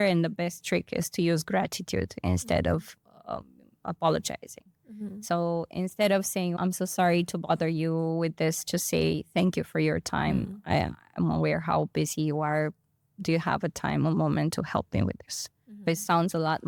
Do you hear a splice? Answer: no; 0 cuts

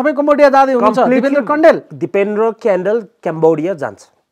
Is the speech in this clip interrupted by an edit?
no; 0 cuts

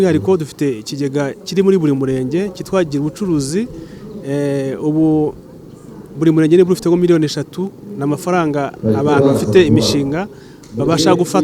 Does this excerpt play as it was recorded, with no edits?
yes; 0 cuts

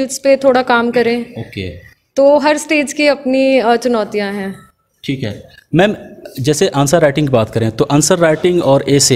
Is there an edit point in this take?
no; 0 cuts

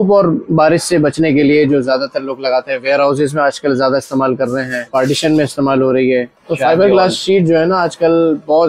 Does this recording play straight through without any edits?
no; 2 cuts; at 4.9 s, 6.4 s

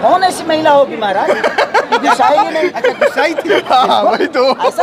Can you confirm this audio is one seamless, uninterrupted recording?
yes; 0 cuts

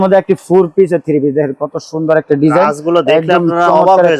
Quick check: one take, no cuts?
yes; 0 cuts

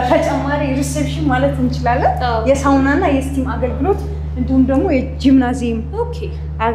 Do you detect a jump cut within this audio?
no; 0 cuts

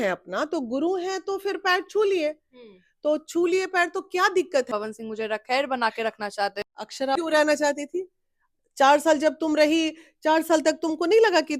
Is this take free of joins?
no; 2 cuts; at 4.7 s, 7.2 s

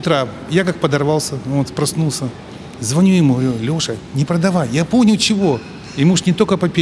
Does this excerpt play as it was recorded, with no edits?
yes; 0 cuts

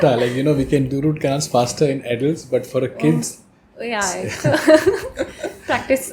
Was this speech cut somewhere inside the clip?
no; 0 cuts

